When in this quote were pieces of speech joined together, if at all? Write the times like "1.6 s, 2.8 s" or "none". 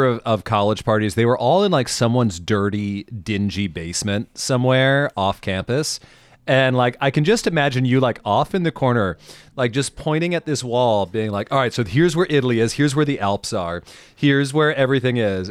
none